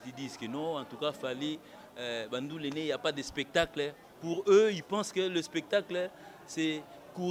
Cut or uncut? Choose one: uncut